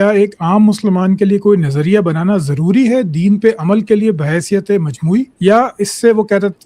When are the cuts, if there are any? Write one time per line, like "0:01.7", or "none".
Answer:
0:05.3